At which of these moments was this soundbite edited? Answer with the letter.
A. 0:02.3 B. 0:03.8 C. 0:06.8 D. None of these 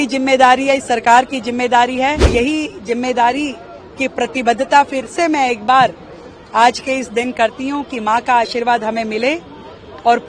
A